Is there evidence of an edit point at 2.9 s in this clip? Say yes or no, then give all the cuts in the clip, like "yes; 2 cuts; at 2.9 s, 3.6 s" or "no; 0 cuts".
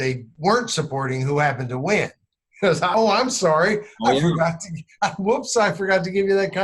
yes; 1 cut; at 2.9 s